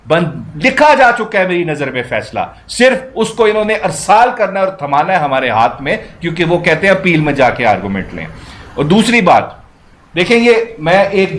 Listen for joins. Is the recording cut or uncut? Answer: uncut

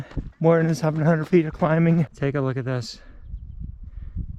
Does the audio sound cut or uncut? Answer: cut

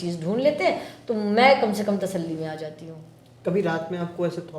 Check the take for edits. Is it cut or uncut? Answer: uncut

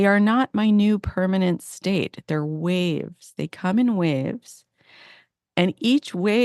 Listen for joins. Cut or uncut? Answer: uncut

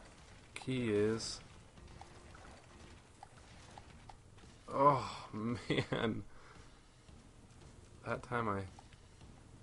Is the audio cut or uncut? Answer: cut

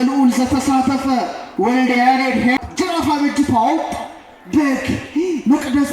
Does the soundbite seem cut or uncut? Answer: cut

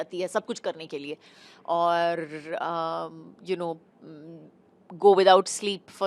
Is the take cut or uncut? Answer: uncut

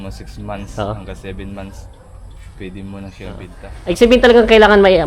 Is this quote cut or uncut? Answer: cut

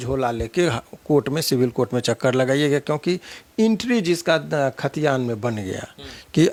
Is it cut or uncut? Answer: uncut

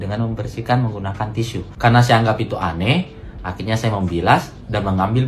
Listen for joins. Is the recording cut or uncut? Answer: uncut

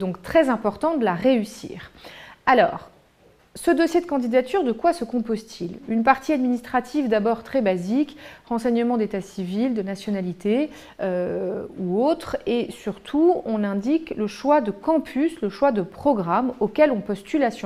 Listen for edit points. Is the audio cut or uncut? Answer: cut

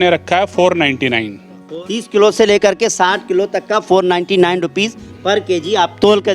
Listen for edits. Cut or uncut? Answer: cut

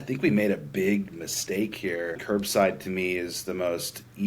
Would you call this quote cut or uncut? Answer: cut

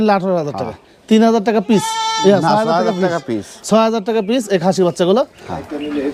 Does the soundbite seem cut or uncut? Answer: uncut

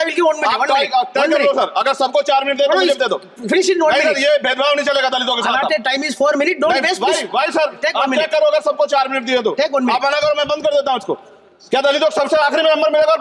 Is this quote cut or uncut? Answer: uncut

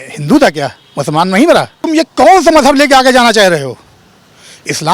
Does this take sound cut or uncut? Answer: cut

